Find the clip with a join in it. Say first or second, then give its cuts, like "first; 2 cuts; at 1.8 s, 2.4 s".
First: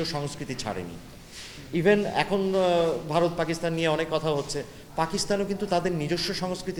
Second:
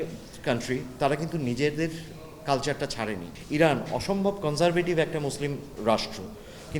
second; 1 cut; at 3.3 s